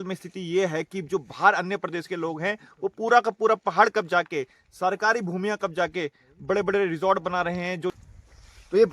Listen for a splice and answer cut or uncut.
cut